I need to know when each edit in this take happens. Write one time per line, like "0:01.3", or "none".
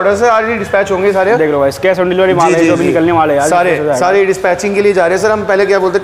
none